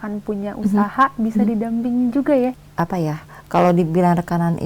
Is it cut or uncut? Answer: cut